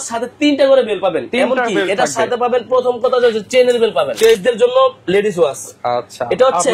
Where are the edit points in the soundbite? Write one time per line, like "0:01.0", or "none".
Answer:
0:04.4